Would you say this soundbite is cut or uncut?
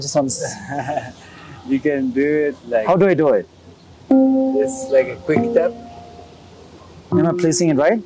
uncut